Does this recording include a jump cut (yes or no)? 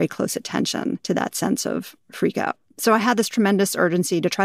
yes